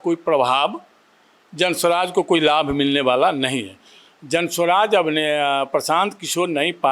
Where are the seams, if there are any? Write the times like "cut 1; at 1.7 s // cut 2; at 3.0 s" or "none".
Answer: none